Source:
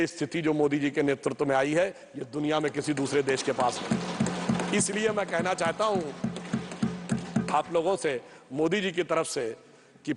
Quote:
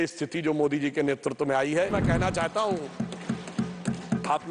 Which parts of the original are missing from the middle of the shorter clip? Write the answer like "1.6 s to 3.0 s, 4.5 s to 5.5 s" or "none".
1.9 s to 5.1 s

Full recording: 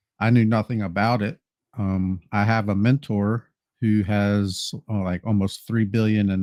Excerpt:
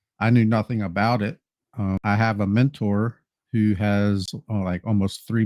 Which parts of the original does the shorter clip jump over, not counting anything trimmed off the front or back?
2.0 s to 2.3 s, 4.6 s to 4.8 s

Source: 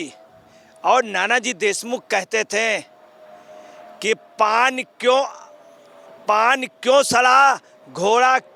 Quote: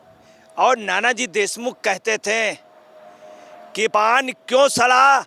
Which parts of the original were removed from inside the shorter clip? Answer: 4.2 s to 6.2 s

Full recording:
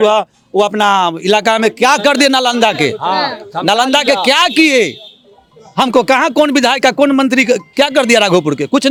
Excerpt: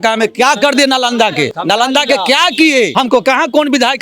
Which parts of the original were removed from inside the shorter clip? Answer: 3.0 s to 3.5 s, 4.9 s to 5.7 s

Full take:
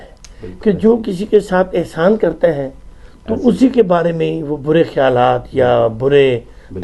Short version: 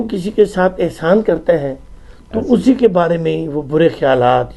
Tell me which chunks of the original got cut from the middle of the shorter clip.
none

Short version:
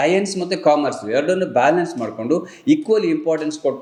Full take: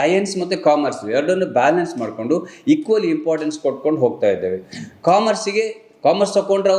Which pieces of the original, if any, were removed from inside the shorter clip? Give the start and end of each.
none

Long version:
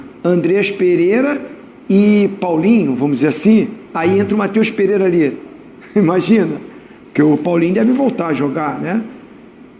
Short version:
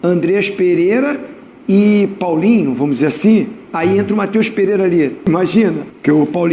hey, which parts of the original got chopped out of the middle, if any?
5.7 s to 6.6 s

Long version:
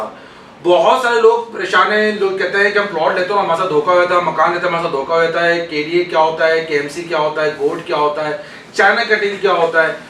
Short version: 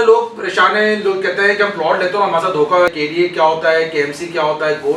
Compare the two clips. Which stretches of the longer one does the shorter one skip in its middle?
4.1 s to 5.7 s

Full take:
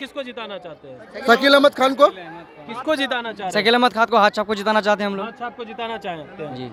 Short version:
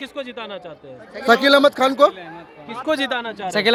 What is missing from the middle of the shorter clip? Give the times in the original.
none

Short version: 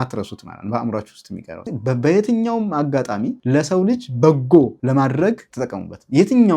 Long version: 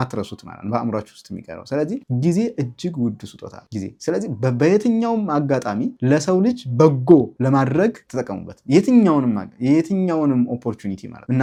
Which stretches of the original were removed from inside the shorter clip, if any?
1.7 s to 4.2 s

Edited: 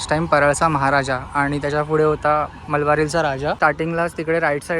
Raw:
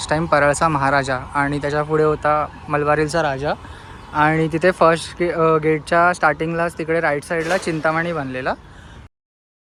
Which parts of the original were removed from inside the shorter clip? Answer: 3.6 s to 6.2 s

